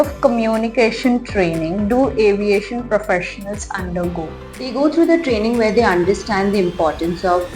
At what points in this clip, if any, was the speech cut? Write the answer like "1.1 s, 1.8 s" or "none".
4.4 s